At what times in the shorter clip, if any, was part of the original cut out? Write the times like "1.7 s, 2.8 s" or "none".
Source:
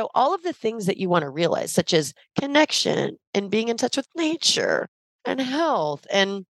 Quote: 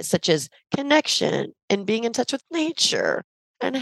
none